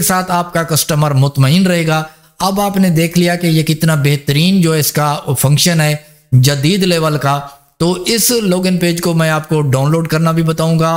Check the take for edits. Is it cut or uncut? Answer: uncut